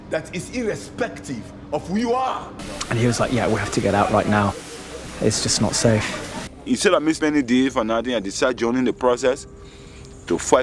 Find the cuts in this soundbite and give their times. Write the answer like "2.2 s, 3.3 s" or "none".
2.5 s, 6.4 s